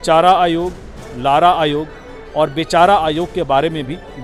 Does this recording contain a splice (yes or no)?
no